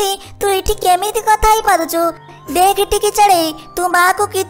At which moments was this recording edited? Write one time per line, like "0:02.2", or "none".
0:02.2